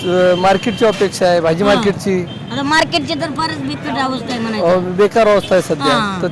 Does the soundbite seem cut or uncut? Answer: uncut